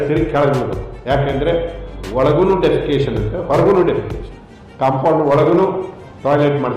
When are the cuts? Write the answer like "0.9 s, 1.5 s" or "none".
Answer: none